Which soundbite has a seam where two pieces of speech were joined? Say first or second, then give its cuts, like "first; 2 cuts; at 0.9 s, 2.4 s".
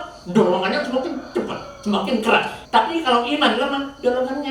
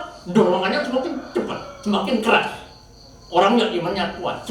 first; 1 cut; at 2.6 s